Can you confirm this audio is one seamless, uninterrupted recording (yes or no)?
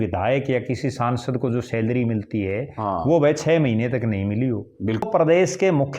no